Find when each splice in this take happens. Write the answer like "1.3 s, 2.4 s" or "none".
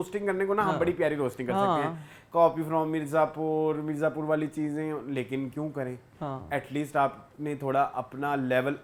none